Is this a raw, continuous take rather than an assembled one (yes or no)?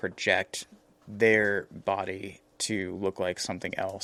yes